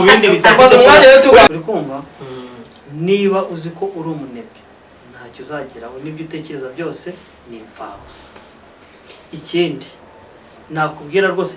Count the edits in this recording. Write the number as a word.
one